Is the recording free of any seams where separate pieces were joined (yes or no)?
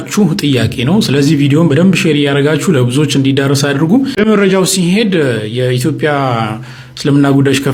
yes